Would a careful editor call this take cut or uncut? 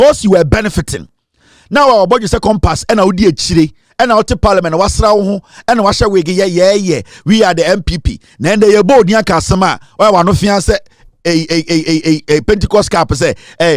uncut